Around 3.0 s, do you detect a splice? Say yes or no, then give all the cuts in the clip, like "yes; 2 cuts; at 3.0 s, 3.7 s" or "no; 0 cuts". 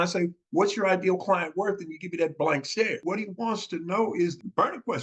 yes; 1 cut; at 3.0 s